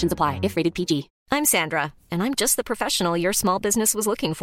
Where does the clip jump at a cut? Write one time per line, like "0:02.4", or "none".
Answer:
0:01.1